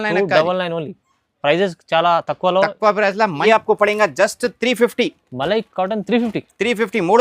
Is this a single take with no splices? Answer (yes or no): no